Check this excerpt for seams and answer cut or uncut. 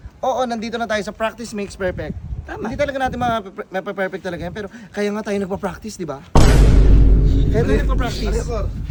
uncut